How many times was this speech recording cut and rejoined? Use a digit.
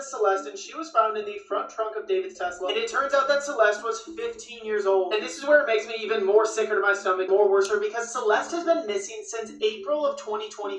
1